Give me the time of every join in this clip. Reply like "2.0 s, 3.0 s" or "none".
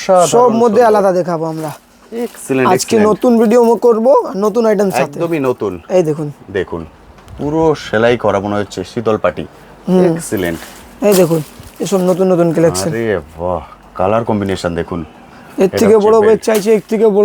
none